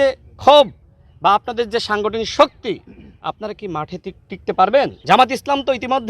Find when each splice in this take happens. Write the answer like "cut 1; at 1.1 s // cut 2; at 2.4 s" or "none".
cut 1; at 5.0 s